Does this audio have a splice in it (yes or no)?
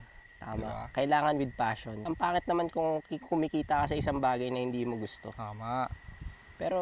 no